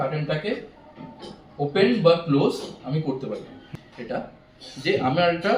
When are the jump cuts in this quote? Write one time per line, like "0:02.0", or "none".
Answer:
0:03.6